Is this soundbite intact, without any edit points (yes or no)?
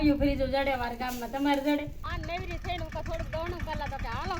no